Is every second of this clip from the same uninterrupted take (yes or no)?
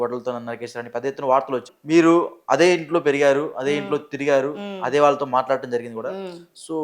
no